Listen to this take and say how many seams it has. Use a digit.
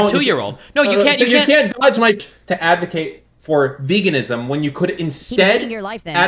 1